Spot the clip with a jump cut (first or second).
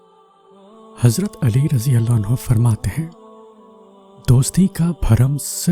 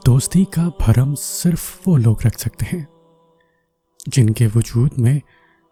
first